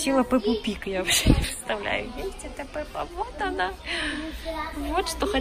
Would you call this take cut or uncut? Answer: uncut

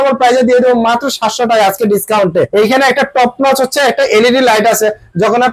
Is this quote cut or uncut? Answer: cut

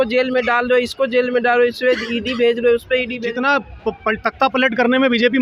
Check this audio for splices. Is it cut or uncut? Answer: cut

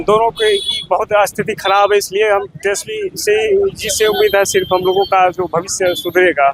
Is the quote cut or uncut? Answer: uncut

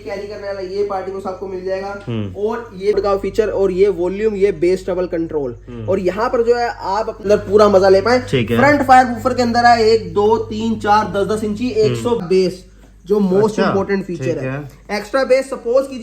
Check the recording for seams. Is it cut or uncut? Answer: cut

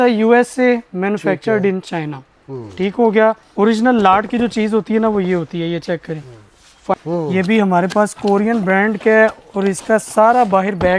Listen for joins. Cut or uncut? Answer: cut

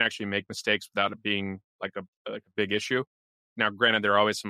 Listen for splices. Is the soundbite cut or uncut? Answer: uncut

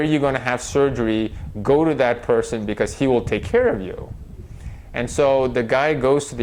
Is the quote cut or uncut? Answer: uncut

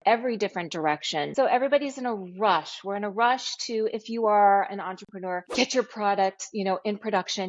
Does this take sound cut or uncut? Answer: cut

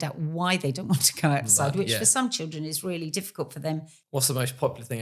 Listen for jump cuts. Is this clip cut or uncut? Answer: cut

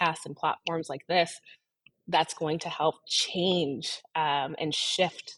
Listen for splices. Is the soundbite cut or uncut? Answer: uncut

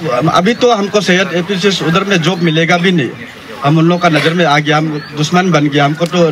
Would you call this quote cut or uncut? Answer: uncut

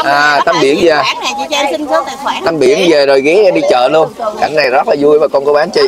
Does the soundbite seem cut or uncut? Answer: uncut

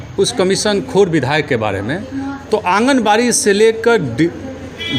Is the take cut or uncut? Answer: uncut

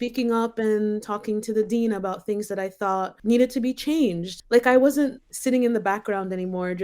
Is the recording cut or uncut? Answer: cut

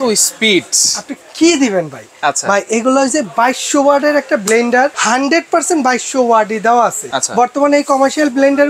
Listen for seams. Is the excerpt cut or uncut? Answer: cut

